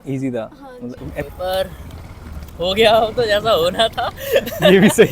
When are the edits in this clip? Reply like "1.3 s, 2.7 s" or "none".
1.2 s

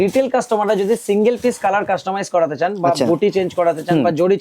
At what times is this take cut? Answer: none

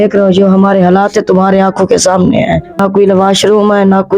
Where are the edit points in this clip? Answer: 2.8 s

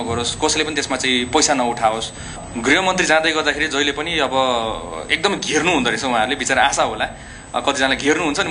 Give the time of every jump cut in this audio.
2.4 s

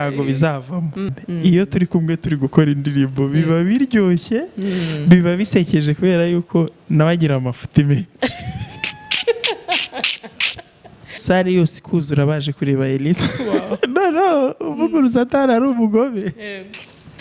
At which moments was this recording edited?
1.2 s, 11.2 s

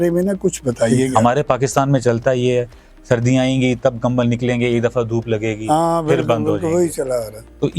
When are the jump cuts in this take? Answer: 1.1 s

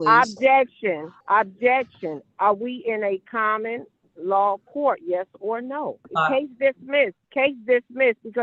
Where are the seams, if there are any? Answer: 1.1 s, 6.1 s, 7.2 s

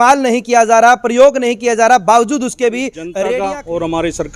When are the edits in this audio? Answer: 3.3 s

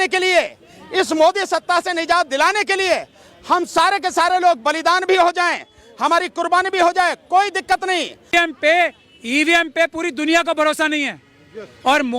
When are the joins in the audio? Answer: 8.3 s

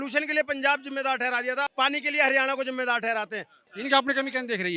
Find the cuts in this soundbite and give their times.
3.6 s

